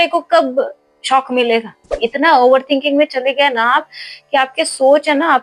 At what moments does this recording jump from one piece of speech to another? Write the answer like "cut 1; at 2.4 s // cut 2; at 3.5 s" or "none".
cut 1; at 1.8 s